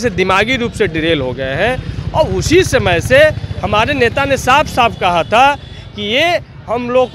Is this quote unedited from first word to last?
yes; 0 cuts

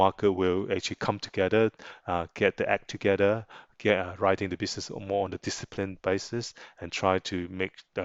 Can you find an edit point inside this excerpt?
no; 0 cuts

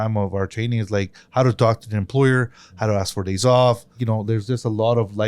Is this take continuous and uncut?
no; 1 cut; at 4.0 s

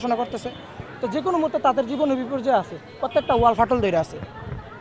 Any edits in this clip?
no; 0 cuts

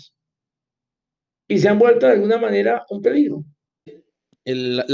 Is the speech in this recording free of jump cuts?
no; 1 cut; at 4.0 s

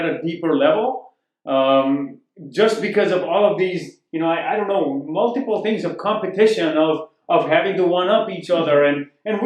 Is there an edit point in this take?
no; 0 cuts

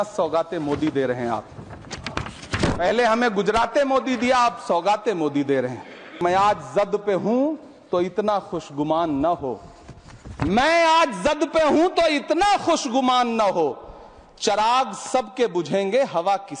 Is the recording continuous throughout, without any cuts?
no; 1 cut; at 6.2 s

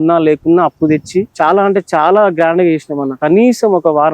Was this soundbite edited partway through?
yes; 2 cuts; at 1.3 s, 3.2 s

